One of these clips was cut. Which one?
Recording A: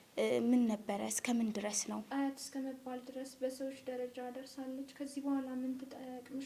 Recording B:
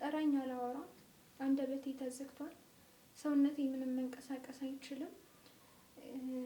A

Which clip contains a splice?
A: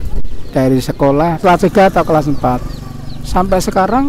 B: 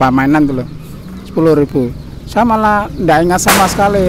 A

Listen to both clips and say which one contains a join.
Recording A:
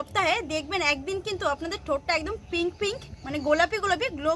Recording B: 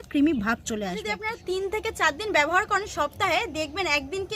B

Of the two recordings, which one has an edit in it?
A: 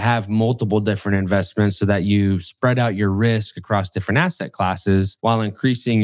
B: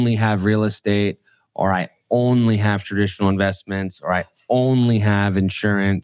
A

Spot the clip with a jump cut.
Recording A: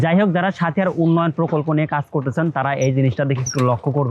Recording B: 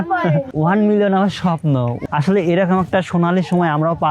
B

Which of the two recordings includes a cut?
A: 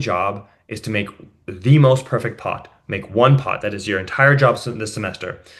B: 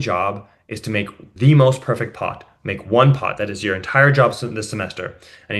B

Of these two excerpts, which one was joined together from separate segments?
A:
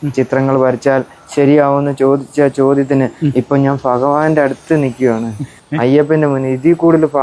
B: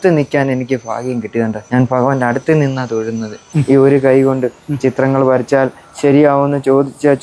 B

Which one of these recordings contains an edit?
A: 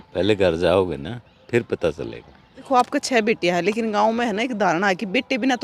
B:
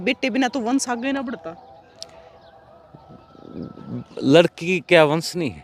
A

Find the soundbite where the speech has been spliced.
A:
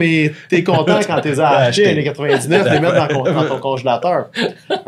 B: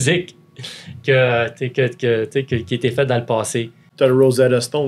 B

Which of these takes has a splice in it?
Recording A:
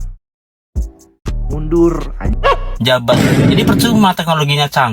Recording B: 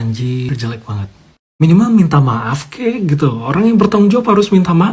A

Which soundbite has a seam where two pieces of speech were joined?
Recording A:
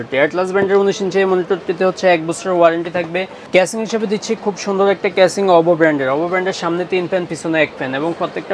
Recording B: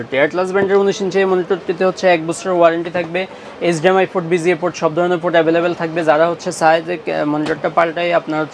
A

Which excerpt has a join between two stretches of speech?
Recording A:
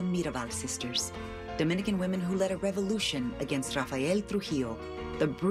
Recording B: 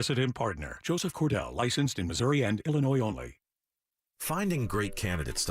B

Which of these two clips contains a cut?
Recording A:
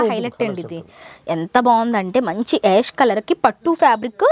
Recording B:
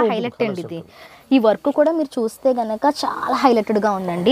B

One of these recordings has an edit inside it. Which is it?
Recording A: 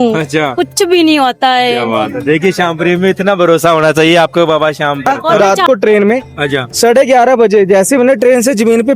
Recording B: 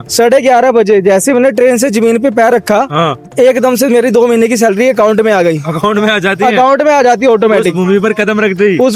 A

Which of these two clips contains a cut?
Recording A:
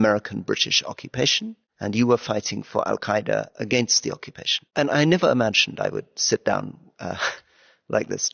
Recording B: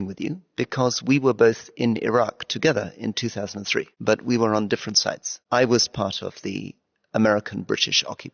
B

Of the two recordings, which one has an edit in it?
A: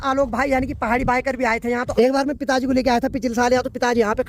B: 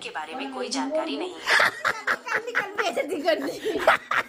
A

